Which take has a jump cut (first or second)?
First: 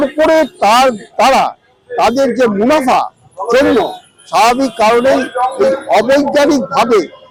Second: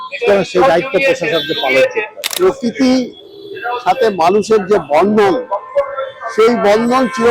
second